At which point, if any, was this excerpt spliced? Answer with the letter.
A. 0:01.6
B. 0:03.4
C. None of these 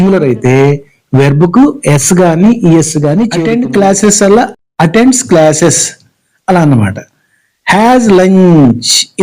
B